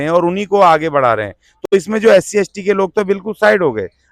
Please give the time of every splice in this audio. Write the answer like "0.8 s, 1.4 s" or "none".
1.5 s